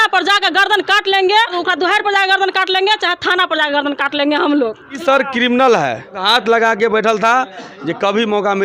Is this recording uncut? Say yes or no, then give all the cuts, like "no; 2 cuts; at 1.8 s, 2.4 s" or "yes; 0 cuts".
no; 3 cuts; at 1.5 s, 5.0 s, 6.2 s